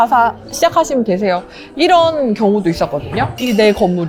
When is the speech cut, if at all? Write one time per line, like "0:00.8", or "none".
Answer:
none